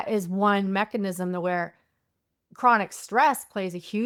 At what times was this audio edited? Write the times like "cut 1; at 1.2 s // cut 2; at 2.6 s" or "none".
none